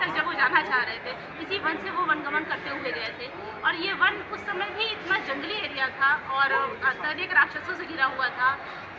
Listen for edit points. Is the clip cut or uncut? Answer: uncut